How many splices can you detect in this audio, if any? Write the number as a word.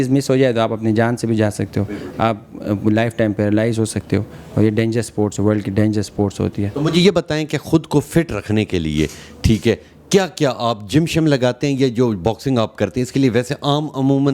zero